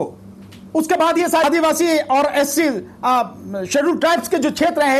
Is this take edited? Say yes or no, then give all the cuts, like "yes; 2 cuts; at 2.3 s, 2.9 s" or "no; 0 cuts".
yes; 1 cut; at 1.4 s